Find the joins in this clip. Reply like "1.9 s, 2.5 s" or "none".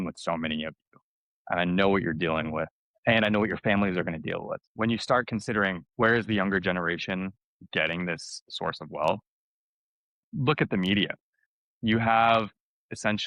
4.5 s

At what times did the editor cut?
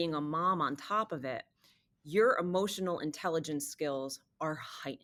none

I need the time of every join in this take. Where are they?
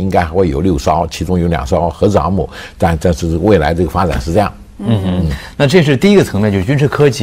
none

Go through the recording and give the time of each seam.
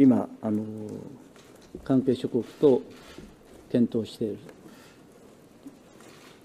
4.9 s

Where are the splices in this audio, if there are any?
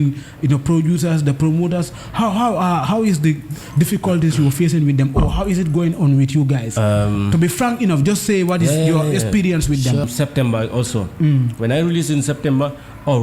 10.0 s

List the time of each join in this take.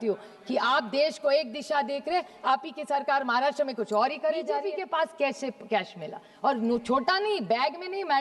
4.7 s

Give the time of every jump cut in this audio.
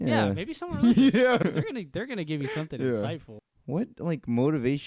1.4 s, 3.3 s

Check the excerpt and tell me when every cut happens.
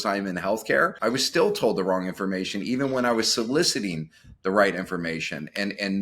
0.9 s

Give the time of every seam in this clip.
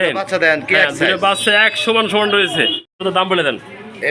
2.9 s

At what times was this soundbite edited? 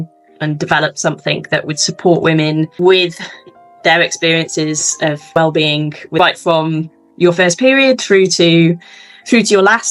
none

